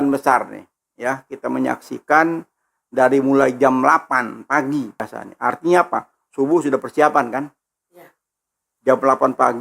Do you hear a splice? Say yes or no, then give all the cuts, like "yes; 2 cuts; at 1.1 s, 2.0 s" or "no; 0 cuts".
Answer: yes; 1 cut; at 5.2 s